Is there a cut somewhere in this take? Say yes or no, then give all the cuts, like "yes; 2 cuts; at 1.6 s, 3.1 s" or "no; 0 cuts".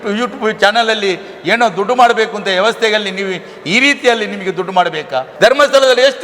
yes; 1 cut; at 5.3 s